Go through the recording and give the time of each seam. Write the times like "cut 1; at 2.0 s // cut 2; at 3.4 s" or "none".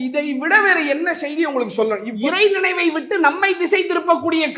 cut 1; at 2.1 s